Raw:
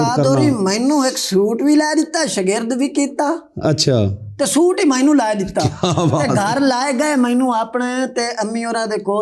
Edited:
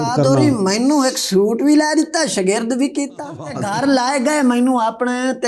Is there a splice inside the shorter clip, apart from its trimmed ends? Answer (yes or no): yes